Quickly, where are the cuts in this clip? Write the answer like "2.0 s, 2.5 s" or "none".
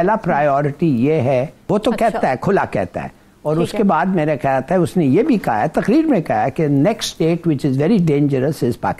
1.6 s